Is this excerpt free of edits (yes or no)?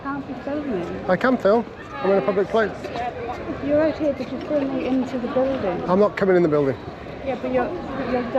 yes